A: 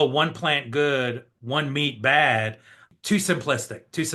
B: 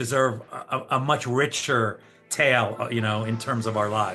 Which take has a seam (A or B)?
A